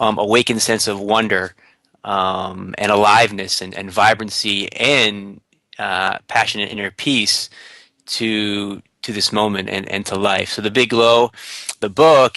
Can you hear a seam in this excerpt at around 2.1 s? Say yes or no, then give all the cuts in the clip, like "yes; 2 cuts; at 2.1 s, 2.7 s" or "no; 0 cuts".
yes; 1 cut; at 2.1 s